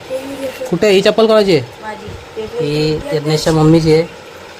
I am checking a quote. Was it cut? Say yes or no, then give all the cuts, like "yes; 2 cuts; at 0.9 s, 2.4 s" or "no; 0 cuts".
no; 0 cuts